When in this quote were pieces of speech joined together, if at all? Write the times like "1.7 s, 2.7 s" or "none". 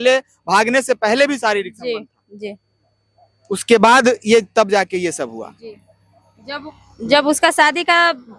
none